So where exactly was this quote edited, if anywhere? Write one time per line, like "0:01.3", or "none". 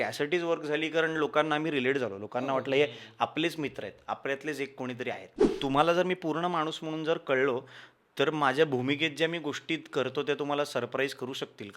0:05.5